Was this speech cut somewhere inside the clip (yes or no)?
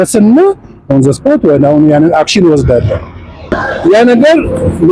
yes